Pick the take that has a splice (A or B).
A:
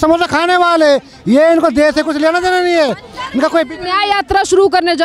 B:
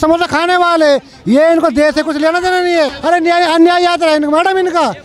B